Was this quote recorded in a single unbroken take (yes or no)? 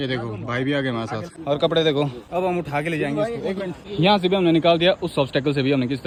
yes